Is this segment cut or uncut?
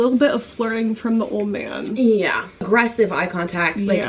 cut